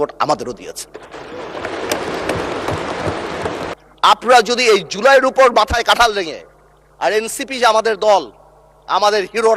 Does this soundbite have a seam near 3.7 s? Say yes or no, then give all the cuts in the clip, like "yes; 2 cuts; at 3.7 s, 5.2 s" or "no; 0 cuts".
yes; 1 cut; at 3.7 s